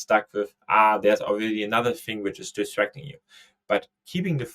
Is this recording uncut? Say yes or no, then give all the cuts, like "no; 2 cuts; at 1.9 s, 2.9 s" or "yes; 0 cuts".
yes; 0 cuts